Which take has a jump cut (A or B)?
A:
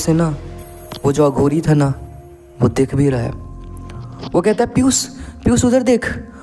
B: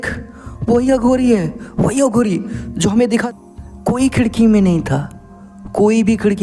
B